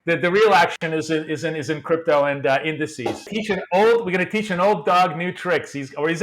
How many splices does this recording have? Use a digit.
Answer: 1